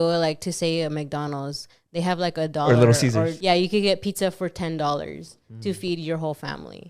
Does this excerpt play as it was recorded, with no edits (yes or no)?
no